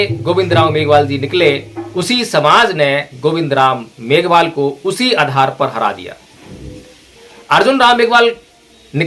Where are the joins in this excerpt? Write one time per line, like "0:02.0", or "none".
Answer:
none

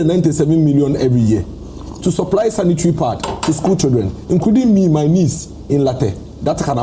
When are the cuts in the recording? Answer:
none

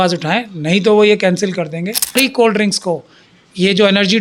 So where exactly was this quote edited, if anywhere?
0:02.1

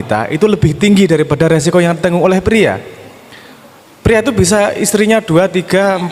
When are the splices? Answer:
none

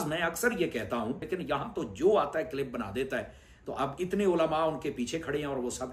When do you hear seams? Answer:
0:01.2

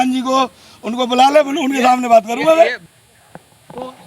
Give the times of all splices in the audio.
0:02.8

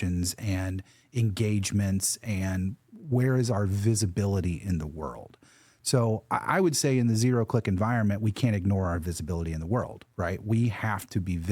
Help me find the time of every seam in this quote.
none

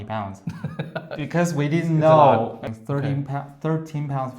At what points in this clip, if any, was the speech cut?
0:02.7

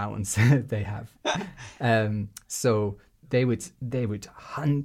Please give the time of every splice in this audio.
none

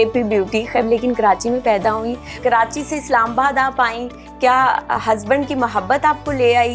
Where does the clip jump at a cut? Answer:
0:00.8
0:02.4

